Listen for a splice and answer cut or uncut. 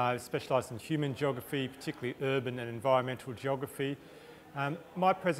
cut